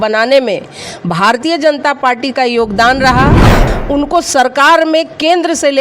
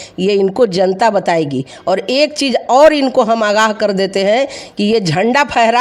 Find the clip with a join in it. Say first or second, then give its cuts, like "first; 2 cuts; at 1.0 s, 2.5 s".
first; 1 cut; at 3.6 s